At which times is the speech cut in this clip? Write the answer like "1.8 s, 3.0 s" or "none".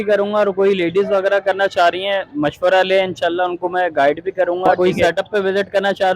4.7 s